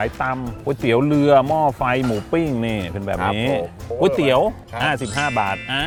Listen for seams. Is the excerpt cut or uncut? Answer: uncut